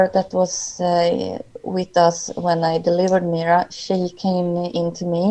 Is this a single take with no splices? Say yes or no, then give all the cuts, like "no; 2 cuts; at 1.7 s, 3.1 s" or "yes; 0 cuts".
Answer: yes; 0 cuts